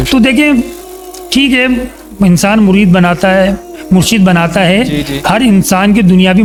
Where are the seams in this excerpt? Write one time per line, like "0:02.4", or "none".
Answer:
none